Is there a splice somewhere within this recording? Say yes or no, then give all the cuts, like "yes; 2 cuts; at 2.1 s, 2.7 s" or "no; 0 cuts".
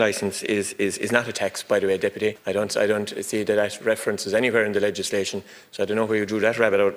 no; 0 cuts